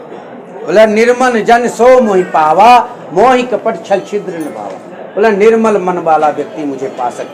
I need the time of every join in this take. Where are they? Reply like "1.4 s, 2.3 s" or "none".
none